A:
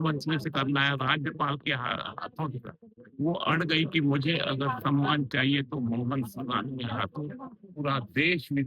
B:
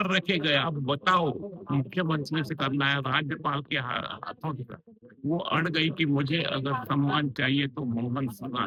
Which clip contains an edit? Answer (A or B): A